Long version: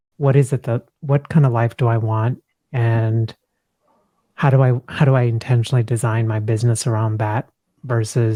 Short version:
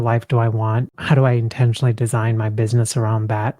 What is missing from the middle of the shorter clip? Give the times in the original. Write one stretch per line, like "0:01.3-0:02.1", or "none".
0:02.5-0:04.9

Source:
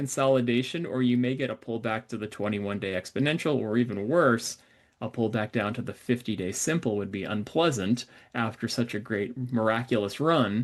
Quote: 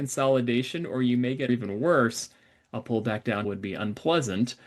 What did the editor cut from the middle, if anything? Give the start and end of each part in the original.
0:01.5-0:03.8
0:05.7-0:07.0

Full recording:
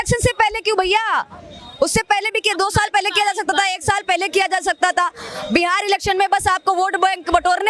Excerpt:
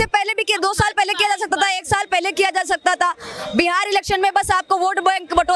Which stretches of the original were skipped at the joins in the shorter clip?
none

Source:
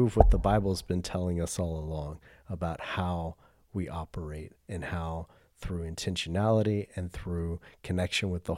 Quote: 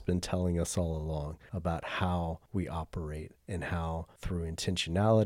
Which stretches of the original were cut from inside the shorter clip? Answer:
0:02.2-0:02.4
0:03.4-0:03.6
0:05.3-0:05.5

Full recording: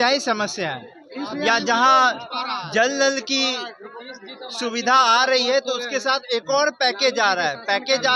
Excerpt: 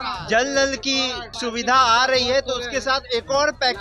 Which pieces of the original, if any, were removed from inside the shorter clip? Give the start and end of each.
0:03.7-0:04.4

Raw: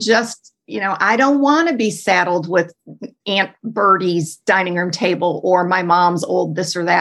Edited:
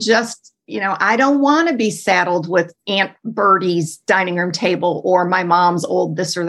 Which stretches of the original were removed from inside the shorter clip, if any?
0:02.8-0:03.2

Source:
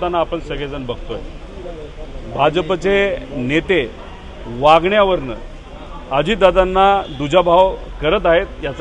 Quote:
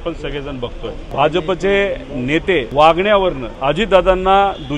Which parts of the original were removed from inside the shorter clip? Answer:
0:01.3-0:02.2
0:03.9-0:04.5
0:05.3-0:06.0

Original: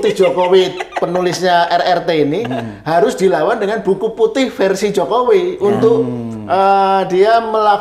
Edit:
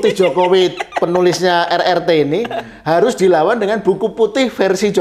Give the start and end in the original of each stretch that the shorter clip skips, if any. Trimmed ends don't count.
none

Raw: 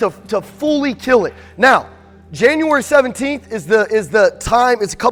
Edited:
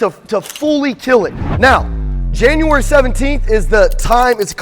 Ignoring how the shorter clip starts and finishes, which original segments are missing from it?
0:03.4-0:03.9

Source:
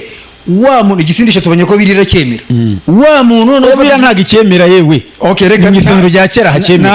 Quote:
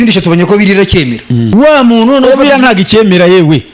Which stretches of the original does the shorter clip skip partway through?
0:02.7-0:02.9

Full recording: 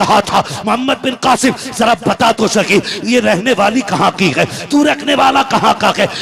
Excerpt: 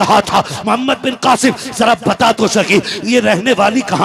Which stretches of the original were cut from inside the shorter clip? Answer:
none

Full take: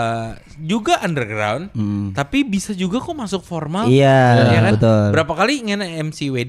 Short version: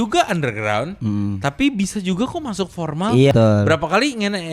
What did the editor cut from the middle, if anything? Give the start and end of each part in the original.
0:04.0-0:04.8

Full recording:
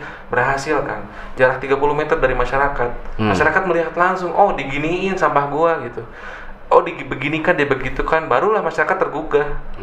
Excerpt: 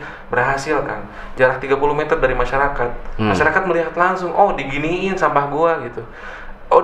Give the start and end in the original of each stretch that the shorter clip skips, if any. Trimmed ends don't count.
none

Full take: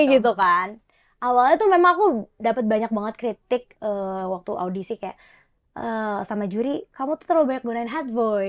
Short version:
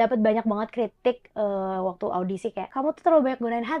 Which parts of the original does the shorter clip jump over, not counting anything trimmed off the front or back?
0:05.1-0:06.9

